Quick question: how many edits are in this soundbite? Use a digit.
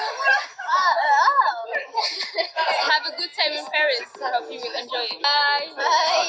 1